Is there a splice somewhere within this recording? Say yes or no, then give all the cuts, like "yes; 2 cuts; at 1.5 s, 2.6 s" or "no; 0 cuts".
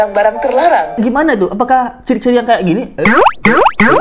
yes; 1 cut; at 1.0 s